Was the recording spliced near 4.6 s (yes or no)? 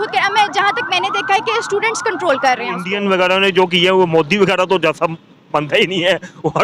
no